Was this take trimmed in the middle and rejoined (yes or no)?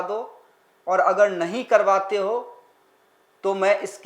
no